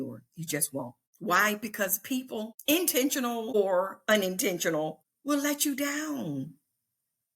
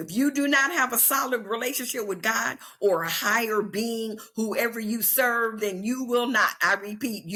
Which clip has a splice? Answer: first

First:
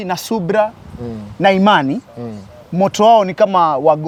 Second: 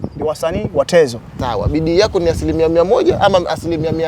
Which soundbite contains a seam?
second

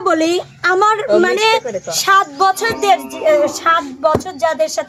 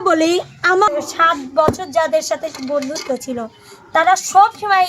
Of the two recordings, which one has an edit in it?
second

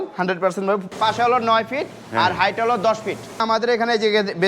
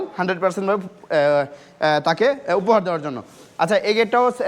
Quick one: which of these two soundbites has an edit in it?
first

